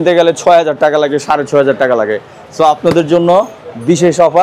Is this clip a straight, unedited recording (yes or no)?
yes